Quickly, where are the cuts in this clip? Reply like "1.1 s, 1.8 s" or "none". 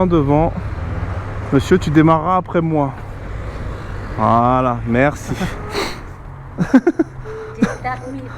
5.6 s